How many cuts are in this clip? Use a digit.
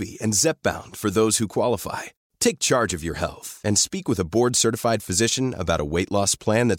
0